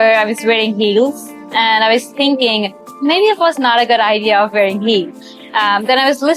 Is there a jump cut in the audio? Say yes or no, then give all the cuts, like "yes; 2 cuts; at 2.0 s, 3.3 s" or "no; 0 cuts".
yes; 1 cut; at 2.9 s